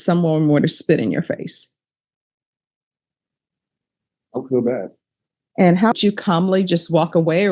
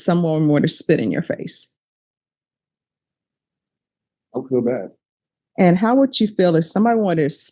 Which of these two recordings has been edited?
first; 1 cut; at 5.9 s

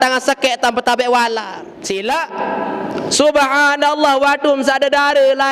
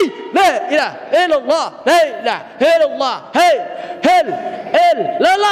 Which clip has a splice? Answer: first; 1 cut; at 1.7 s

